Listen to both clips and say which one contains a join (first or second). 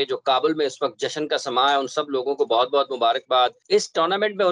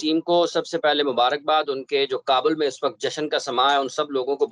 first